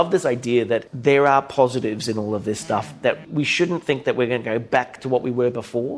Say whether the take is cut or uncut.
cut